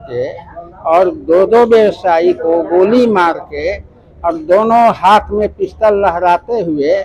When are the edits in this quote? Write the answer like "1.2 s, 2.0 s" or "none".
none